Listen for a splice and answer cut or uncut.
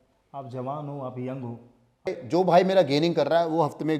cut